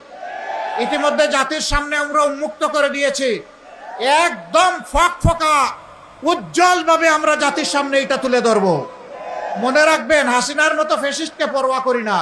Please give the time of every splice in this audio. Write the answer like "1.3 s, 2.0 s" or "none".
none